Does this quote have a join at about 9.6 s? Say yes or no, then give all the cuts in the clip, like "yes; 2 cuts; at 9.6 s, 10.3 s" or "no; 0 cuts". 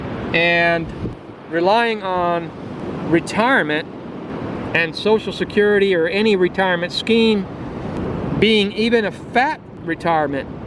no; 0 cuts